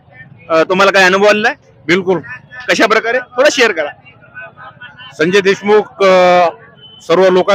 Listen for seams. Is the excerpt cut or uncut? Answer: uncut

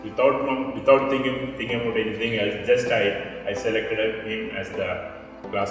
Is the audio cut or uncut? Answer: uncut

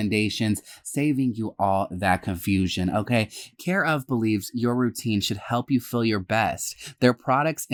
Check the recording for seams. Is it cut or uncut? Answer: uncut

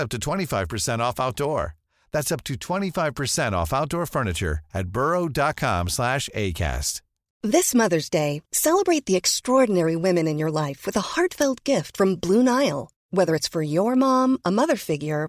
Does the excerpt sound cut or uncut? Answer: cut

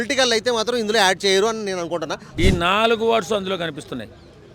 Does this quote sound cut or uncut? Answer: cut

